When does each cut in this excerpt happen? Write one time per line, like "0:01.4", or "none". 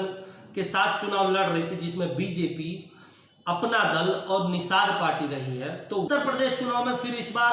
0:06.1